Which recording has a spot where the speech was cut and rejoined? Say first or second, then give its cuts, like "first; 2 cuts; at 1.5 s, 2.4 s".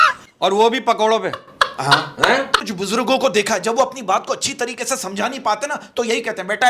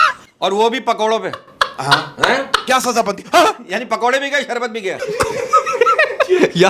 first; 1 cut; at 2.6 s